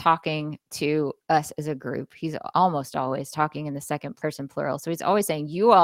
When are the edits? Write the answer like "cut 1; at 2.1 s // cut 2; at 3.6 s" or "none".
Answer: cut 1; at 2.4 s // cut 2; at 4.1 s